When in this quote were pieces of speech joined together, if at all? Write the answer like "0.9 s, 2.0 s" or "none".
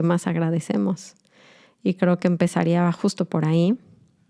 none